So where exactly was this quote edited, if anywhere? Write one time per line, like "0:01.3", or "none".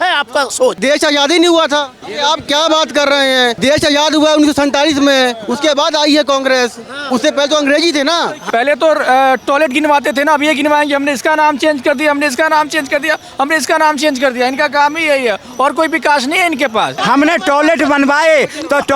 0:00.8
0:02.0
0:03.6
0:08.4
0:17.0